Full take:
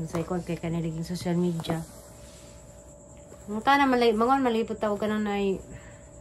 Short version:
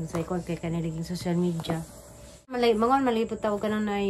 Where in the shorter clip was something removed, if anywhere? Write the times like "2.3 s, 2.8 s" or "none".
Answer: 2.6 s